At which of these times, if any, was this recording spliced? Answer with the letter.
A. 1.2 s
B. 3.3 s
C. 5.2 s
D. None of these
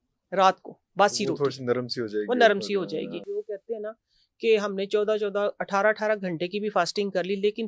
B